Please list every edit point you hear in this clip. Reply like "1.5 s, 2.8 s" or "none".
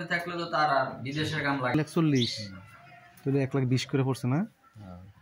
1.7 s